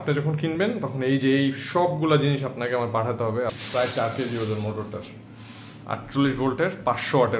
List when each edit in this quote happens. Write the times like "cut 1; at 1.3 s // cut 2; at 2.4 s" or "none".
cut 1; at 3.6 s